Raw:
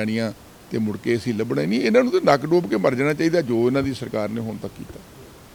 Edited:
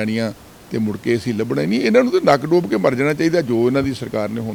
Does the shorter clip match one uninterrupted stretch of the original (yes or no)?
yes